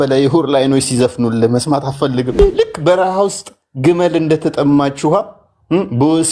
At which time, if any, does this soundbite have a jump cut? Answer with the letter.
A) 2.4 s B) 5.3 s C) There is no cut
A